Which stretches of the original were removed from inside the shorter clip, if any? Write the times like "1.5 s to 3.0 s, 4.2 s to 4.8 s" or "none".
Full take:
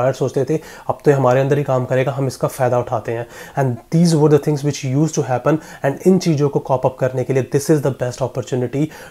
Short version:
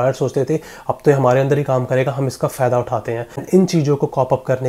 3.4 s to 6.0 s